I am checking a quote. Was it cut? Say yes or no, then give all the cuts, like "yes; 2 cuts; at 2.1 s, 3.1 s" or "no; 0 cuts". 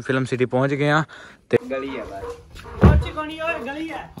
yes; 1 cut; at 1.6 s